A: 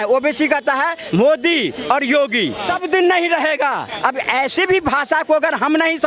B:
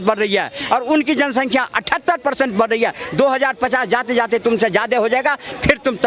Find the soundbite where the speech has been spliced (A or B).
A